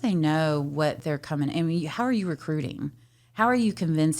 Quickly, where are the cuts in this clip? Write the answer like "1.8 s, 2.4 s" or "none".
1.0 s